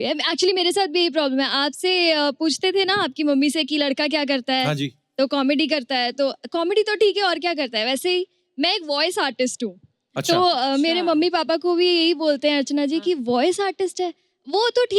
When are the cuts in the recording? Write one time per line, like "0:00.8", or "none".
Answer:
none